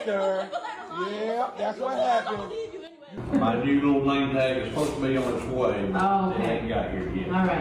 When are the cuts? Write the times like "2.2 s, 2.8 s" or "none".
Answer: 3.0 s

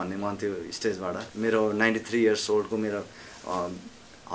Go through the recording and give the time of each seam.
1.3 s

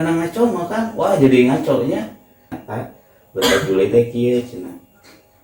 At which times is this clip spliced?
2.6 s

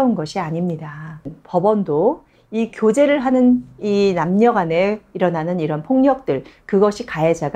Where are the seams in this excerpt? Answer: 1.4 s

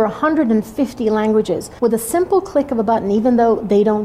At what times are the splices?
1.7 s

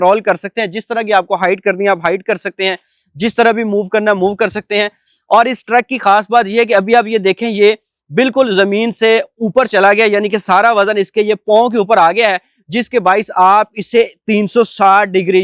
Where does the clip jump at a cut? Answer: none

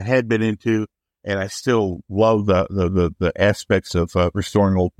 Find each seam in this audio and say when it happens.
none

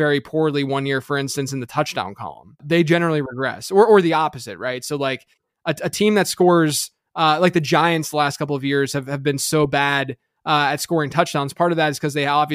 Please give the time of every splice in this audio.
2.6 s

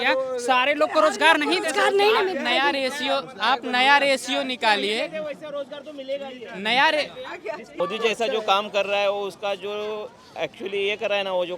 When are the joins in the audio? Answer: 7.7 s

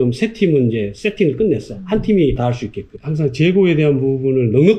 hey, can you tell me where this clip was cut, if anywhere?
2.5 s

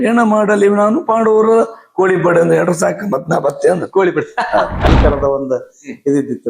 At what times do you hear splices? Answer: 4.8 s

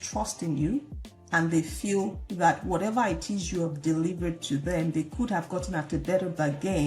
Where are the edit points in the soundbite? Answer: none

